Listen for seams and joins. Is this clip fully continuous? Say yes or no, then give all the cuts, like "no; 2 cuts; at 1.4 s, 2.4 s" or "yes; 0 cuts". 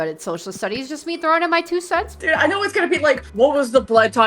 no; 2 cuts; at 2.1 s, 3.3 s